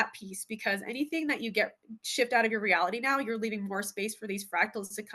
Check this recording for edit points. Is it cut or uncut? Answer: uncut